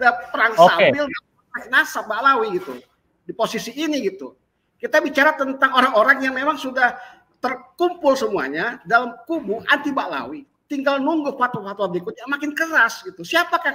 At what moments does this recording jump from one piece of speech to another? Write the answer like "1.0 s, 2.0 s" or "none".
none